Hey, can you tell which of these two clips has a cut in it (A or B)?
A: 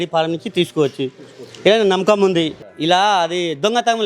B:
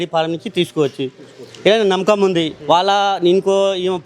A